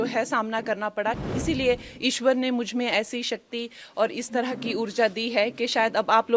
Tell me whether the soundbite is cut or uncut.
cut